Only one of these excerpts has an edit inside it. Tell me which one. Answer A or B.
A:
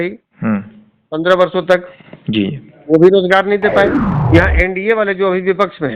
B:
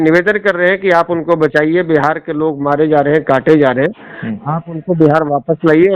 A